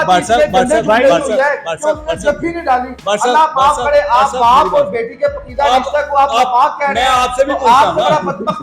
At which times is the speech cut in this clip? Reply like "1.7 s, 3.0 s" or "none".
none